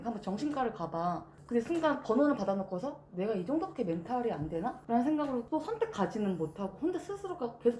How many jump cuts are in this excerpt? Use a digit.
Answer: 2